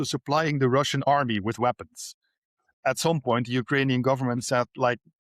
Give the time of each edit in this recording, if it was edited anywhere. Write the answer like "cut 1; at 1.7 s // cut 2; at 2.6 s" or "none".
cut 1; at 2.5 s